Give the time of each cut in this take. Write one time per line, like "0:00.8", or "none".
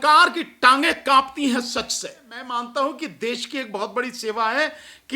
0:02.4